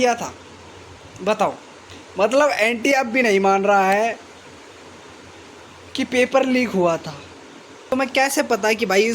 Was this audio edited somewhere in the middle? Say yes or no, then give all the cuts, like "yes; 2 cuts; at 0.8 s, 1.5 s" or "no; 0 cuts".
yes; 1 cut; at 7.9 s